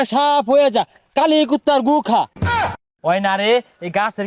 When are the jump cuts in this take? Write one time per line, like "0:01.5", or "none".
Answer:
0:02.3